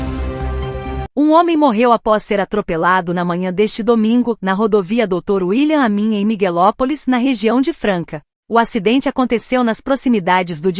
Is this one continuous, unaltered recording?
yes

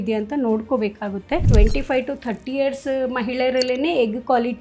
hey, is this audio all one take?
no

